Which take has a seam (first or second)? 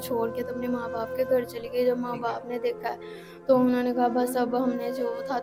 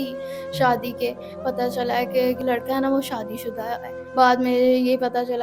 second